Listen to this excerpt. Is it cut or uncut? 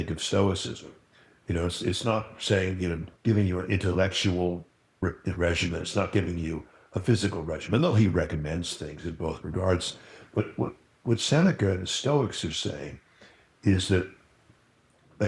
cut